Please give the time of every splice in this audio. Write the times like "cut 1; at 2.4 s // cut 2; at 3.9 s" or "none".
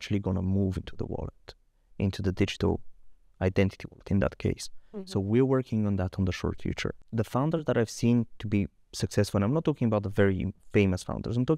cut 1; at 7.0 s // cut 2; at 10.6 s